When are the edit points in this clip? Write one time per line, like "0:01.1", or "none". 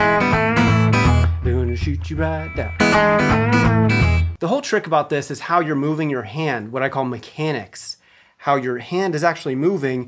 0:04.3